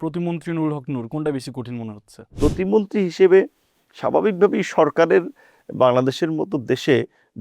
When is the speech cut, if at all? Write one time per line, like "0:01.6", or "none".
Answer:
0:02.3